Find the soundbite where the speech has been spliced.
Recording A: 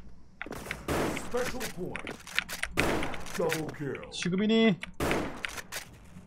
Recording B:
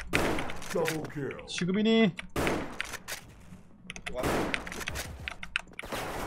B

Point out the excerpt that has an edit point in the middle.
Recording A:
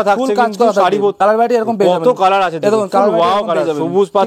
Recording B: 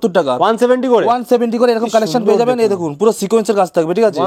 A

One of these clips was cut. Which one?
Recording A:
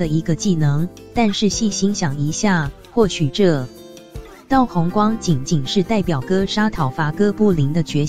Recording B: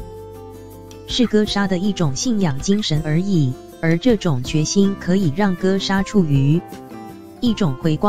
B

